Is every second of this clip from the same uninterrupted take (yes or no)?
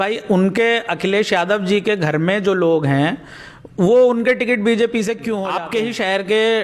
no